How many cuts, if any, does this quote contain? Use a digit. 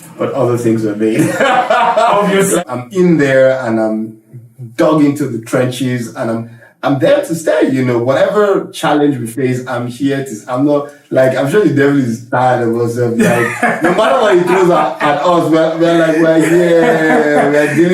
1